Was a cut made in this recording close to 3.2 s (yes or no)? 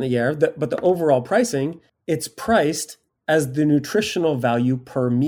no